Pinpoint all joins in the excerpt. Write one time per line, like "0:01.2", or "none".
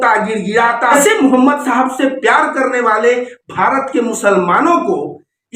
0:01.0